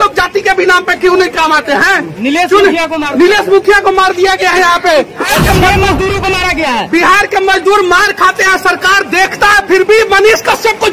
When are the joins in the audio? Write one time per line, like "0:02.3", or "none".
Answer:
0:05.3